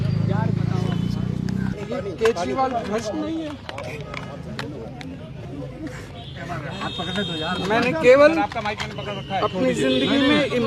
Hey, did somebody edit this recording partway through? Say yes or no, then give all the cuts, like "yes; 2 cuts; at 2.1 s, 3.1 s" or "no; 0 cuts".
no; 0 cuts